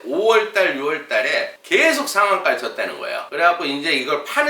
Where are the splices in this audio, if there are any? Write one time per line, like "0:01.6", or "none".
0:03.2